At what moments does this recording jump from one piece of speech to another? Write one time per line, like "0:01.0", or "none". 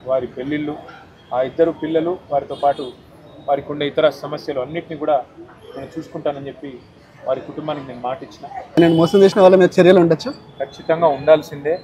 0:08.8